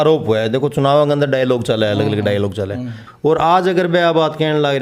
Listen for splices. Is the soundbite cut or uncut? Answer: cut